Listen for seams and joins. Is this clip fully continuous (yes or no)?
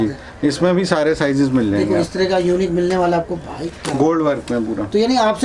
yes